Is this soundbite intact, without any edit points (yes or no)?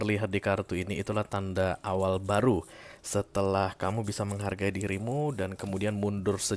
yes